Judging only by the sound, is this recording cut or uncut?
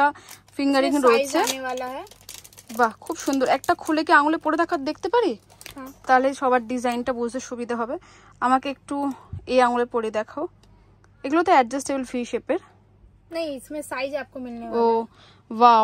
uncut